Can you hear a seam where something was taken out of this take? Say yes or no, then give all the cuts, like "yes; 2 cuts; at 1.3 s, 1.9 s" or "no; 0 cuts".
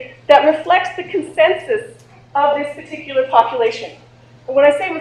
no; 0 cuts